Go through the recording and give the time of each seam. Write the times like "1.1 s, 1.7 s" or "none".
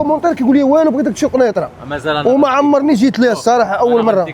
none

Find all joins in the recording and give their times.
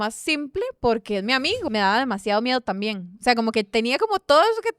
1.6 s

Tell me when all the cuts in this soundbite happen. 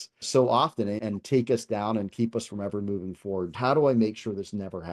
3.5 s

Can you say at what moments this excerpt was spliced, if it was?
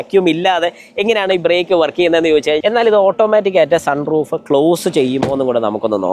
2.6 s

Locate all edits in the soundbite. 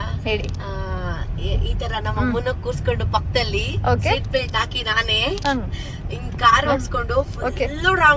none

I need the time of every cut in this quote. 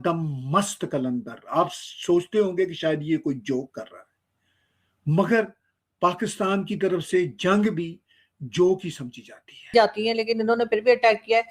9.6 s

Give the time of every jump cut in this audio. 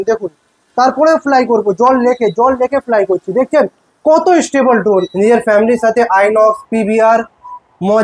5.1 s

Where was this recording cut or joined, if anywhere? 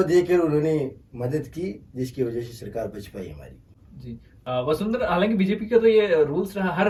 none

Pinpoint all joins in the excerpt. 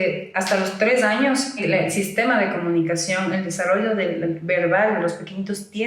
1.6 s

